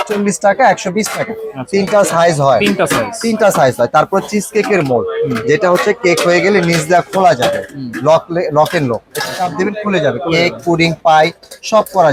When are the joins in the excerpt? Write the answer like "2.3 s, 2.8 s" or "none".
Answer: none